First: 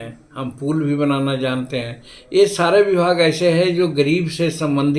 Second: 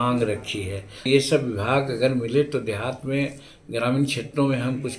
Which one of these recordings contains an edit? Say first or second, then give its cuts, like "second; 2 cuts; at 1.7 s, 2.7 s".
second; 1 cut; at 1.1 s